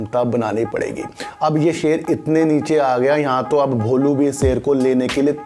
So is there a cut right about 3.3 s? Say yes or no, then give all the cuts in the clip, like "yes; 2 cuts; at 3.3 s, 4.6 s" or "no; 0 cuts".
no; 0 cuts